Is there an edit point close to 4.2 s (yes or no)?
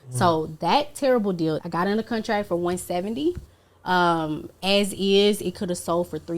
no